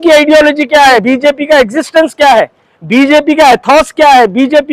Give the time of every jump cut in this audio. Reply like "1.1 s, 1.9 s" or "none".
1.0 s